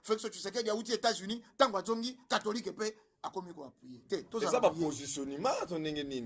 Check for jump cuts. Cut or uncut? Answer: uncut